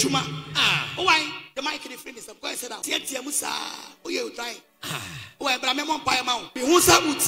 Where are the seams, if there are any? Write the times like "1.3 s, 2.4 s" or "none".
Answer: 2.8 s, 6.5 s